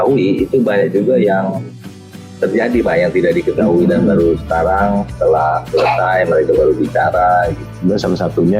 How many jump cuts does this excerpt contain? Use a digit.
1